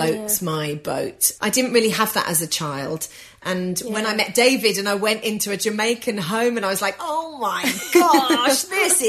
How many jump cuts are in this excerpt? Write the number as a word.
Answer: two